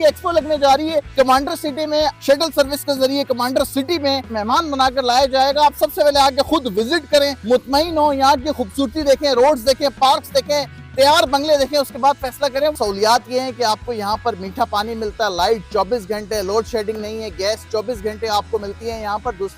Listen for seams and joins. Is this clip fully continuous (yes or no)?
no